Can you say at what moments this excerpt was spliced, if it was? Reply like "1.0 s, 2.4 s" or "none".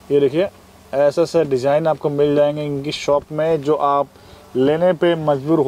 none